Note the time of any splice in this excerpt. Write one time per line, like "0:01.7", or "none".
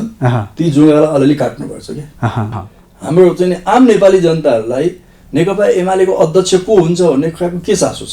0:02.5

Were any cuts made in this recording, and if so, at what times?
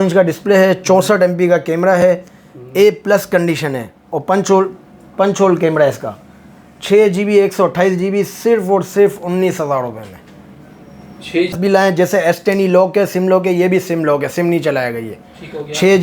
0:11.5

